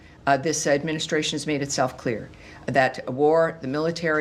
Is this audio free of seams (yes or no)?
yes